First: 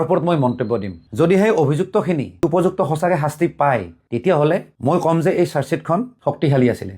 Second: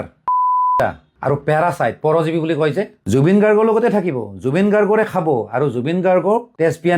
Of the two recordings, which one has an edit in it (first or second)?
first